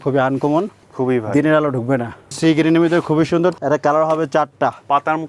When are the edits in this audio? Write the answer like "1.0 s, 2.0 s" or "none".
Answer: 0.9 s, 2.3 s, 3.6 s